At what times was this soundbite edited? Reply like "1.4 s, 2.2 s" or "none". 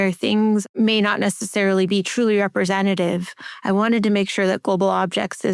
none